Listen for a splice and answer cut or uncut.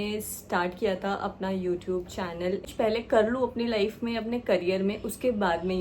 cut